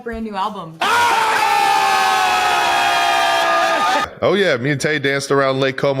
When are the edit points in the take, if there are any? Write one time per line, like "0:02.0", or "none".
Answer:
0:04.1